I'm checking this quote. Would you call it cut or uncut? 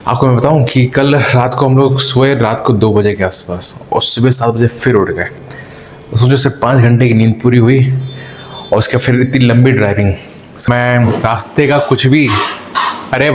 cut